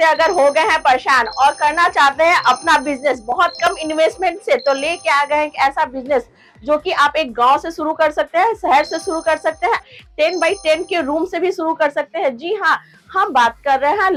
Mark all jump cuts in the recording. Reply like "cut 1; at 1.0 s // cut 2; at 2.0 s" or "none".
none